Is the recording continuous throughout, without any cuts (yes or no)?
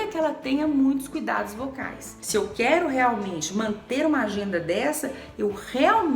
no